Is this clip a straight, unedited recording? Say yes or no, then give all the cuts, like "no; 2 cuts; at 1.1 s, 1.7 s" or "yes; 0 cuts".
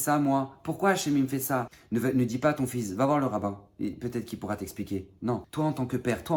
no; 2 cuts; at 1.8 s, 5.5 s